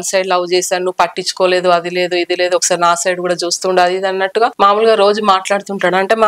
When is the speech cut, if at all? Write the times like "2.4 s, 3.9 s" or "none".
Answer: none